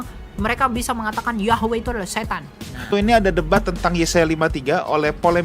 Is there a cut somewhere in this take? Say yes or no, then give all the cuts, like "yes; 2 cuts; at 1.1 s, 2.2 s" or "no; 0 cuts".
yes; 1 cut; at 2.9 s